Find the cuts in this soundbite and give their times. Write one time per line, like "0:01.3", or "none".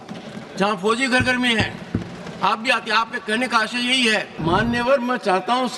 0:04.3